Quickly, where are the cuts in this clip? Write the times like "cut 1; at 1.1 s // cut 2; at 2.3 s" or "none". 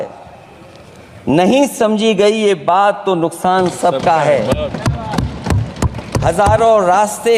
none